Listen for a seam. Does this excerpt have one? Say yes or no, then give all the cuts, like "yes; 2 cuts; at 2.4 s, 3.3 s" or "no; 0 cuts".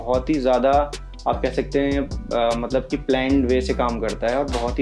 no; 0 cuts